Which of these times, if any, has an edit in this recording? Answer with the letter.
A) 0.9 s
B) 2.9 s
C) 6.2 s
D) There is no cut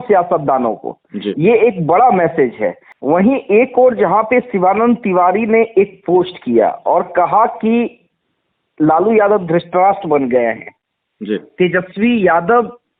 B